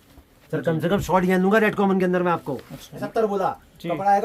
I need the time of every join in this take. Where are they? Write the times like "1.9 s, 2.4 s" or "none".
3.0 s